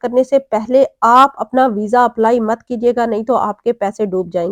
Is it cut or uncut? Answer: uncut